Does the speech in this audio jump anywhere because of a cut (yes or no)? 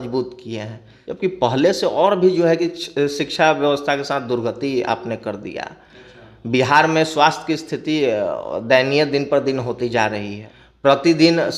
no